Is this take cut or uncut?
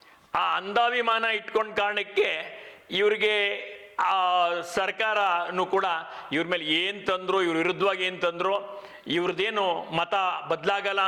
uncut